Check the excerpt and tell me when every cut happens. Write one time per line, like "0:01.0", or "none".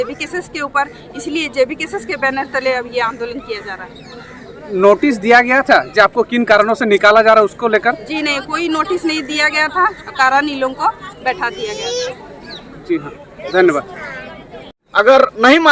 0:14.8